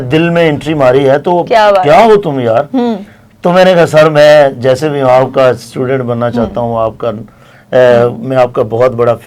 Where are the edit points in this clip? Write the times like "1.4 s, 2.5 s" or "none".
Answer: none